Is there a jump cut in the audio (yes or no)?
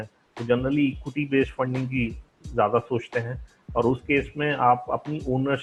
no